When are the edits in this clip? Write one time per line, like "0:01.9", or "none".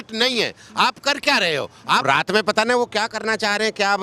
0:02.0